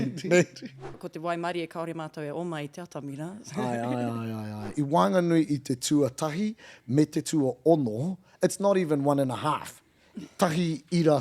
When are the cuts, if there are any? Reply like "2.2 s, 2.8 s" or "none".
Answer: 1.0 s, 4.7 s